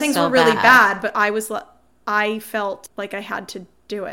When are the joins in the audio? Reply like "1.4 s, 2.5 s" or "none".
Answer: 2.9 s